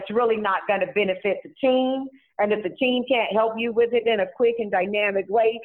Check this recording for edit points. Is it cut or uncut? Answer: uncut